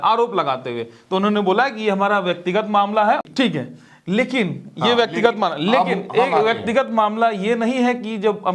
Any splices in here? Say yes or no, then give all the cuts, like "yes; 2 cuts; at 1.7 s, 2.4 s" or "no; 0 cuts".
yes; 1 cut; at 3.2 s